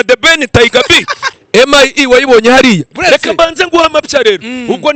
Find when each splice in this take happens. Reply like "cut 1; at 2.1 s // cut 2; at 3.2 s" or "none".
cut 1; at 1.2 s // cut 2; at 2.9 s

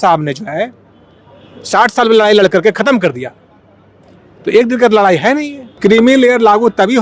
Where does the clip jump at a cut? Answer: cut 1; at 5.6 s

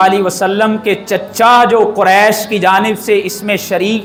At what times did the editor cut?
none

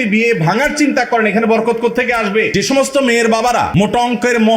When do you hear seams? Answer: cut 1; at 2.5 s // cut 2; at 3.7 s

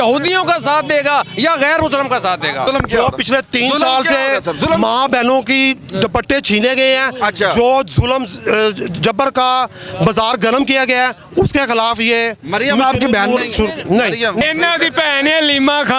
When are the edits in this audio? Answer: cut 1; at 2.6 s // cut 2; at 14.4 s

